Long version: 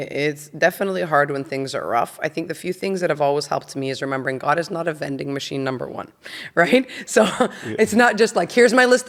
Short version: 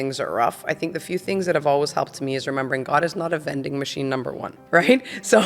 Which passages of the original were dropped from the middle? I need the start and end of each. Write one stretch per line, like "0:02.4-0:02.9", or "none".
0:06.1-0:06.4